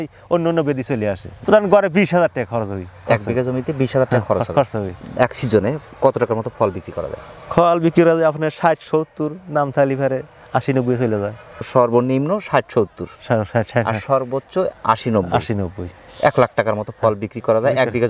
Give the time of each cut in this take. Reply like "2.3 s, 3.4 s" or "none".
1.3 s, 11.7 s